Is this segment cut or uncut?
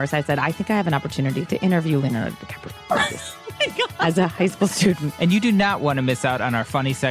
cut